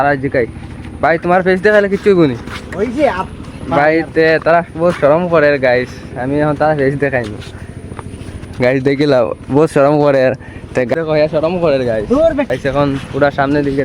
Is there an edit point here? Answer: yes; 2 cuts; at 10.9 s, 12.5 s

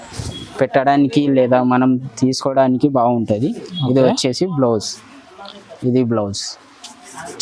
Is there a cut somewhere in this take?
no; 0 cuts

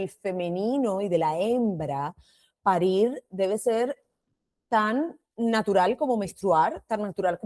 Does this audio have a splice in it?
no; 0 cuts

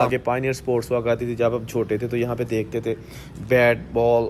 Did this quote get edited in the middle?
no; 0 cuts

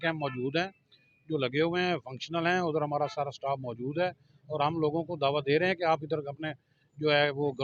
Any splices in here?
no; 0 cuts

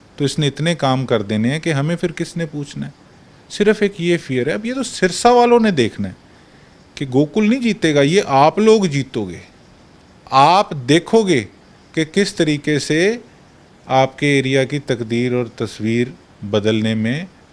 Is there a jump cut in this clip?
no; 0 cuts

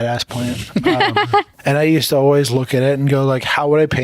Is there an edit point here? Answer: yes; 1 cut; at 1.5 s

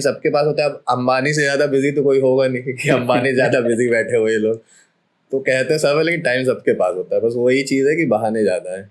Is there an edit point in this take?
no; 0 cuts

